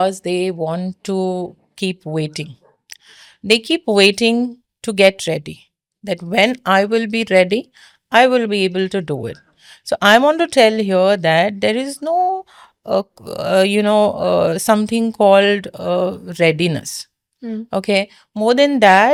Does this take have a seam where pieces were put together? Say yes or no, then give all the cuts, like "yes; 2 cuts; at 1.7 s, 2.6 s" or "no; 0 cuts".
no; 0 cuts